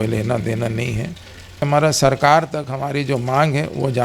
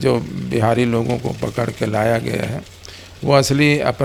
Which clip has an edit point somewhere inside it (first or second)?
first